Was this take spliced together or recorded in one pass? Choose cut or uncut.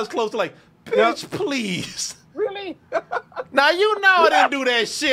uncut